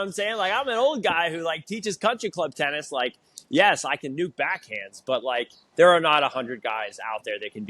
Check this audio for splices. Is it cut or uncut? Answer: cut